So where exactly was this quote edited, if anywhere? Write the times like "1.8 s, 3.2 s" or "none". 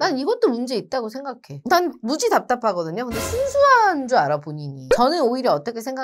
4.8 s

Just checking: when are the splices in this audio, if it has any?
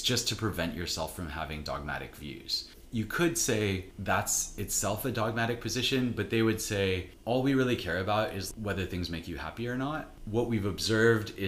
2.8 s, 3.9 s, 7.1 s, 8.4 s, 10.1 s

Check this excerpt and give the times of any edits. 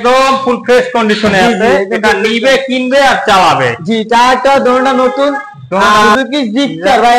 6.1 s

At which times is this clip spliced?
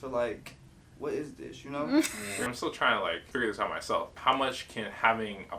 2.3 s, 3.2 s, 4.2 s

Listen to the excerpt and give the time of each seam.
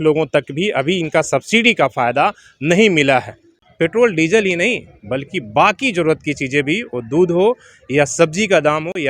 3.5 s

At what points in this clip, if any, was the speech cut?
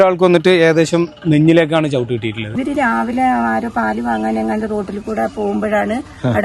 2.5 s

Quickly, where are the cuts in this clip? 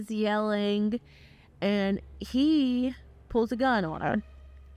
none

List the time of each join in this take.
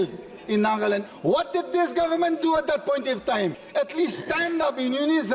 1.0 s, 3.6 s

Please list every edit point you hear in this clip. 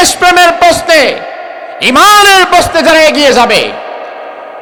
none

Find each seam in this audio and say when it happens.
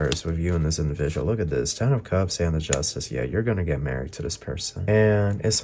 4.7 s

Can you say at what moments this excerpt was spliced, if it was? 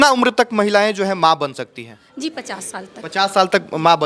none

